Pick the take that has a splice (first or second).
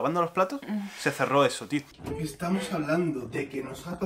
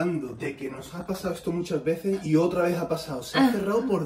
first